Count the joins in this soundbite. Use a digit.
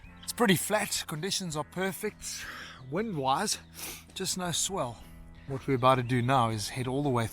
1